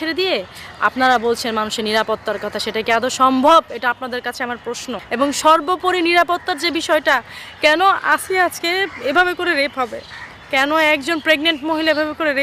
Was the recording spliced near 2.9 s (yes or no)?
no